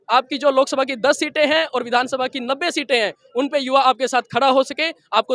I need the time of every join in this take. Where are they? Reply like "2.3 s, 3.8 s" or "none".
none